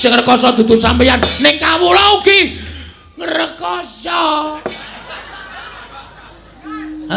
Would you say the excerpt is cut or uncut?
uncut